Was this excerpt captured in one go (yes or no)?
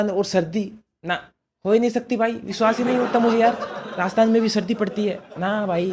yes